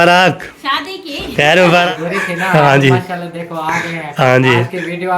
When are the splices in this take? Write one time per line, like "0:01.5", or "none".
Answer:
0:01.9